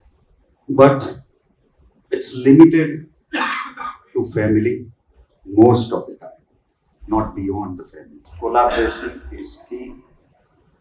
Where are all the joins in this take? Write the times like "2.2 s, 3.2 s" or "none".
8.2 s